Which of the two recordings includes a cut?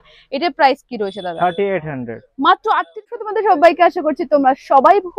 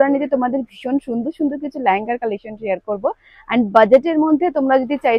first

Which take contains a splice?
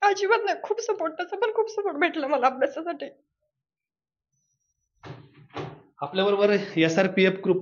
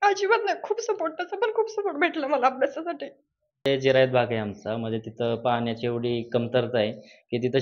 second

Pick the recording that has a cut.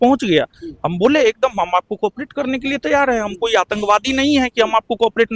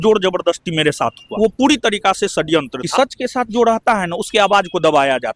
second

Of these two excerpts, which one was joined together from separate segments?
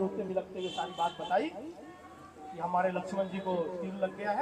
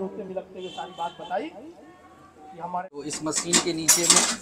second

